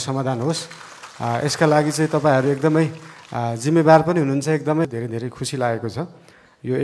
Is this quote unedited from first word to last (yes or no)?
no